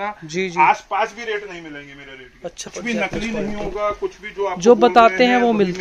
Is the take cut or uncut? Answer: cut